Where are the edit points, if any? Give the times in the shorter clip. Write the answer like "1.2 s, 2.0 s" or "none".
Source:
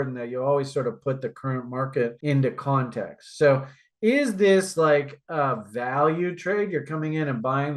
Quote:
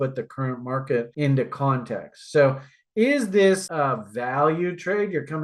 3.6 s

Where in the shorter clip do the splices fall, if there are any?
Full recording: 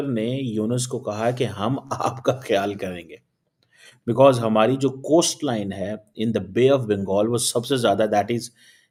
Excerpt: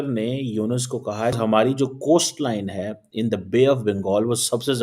1.3 s

